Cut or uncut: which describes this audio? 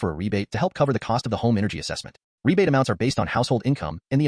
uncut